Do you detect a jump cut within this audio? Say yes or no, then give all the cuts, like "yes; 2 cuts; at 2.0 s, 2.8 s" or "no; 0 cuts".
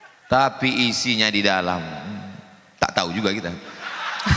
no; 0 cuts